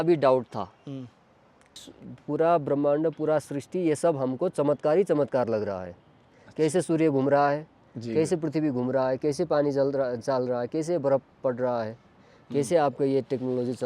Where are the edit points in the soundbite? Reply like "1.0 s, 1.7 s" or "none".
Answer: 1.8 s